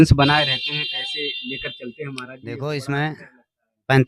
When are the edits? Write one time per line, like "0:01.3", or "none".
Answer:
0:02.4